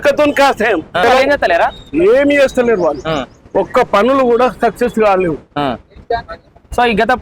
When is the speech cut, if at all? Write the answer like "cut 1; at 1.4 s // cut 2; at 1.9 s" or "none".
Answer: cut 1; at 1.0 s